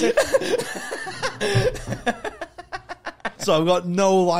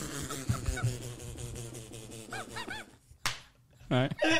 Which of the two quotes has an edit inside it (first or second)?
first